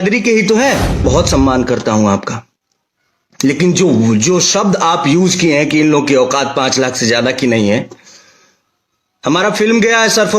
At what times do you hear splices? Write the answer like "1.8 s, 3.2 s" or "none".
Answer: 1.0 s